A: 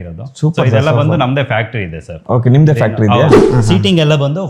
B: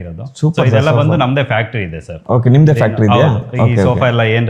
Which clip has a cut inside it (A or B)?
A